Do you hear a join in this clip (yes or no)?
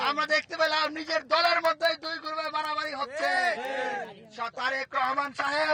no